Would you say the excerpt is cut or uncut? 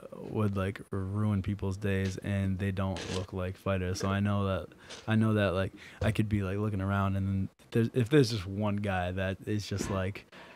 uncut